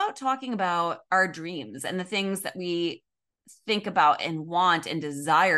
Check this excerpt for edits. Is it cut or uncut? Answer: uncut